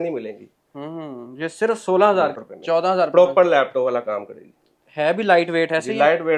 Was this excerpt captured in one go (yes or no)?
no